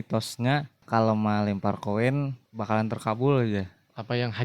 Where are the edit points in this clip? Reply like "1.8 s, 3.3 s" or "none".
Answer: 0.8 s, 2.4 s

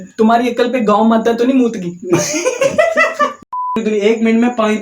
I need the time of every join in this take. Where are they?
3.6 s

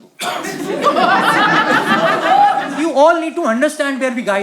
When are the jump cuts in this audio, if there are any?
2.7 s

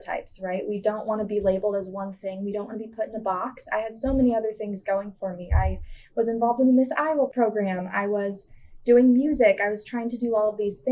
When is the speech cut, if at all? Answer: 7.3 s

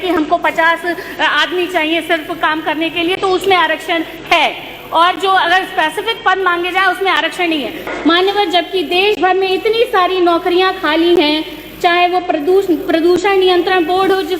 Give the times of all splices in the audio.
7.9 s

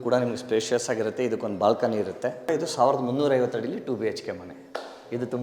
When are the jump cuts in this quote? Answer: 2.3 s

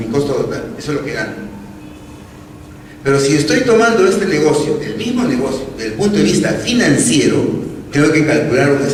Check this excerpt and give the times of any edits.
none

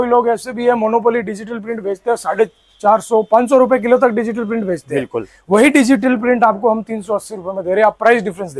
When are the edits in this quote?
none

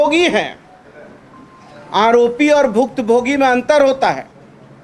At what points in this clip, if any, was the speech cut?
none

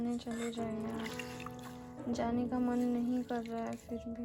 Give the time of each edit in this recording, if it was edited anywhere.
none

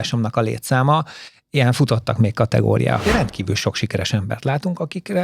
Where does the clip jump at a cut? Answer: 3.0 s

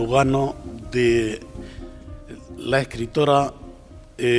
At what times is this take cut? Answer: none

